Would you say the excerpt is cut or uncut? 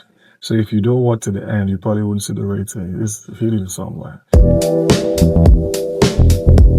cut